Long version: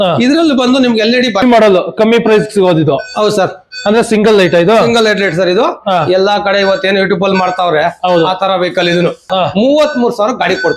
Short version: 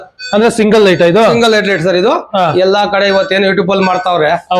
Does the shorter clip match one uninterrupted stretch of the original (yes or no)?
yes